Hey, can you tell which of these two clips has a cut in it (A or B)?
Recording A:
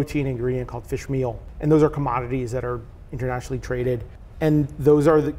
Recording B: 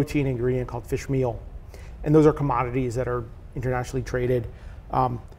A